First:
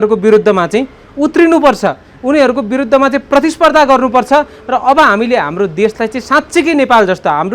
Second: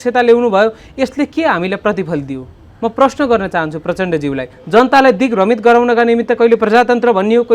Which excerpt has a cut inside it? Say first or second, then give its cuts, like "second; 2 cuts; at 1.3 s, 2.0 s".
second; 1 cut; at 4.6 s